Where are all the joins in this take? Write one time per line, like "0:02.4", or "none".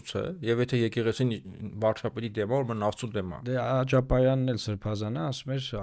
0:03.4